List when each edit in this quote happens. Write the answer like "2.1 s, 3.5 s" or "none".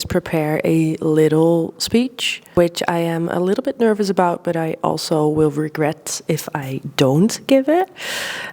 2.5 s